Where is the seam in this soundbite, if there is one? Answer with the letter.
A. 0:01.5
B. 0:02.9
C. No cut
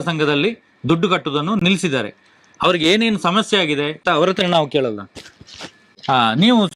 A